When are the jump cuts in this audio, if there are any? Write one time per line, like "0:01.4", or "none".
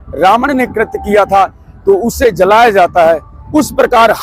none